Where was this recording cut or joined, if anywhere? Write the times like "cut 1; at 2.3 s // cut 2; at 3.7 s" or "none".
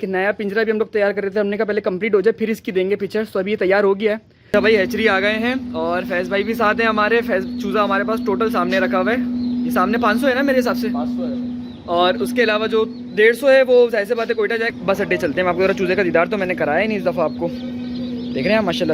cut 1; at 4.3 s // cut 2; at 14.7 s

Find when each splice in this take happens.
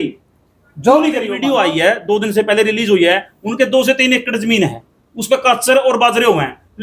cut 1; at 1.3 s

